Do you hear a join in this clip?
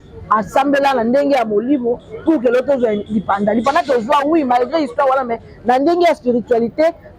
no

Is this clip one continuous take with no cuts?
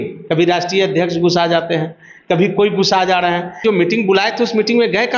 no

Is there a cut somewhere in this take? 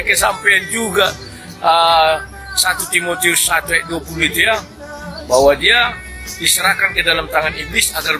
no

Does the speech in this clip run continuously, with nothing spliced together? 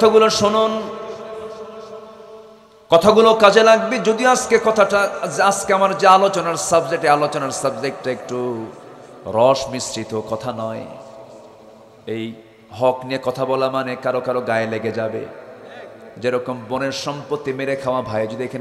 yes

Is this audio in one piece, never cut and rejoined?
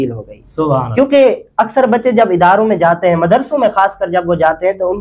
yes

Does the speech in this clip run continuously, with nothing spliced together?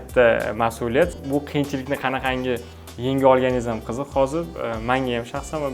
no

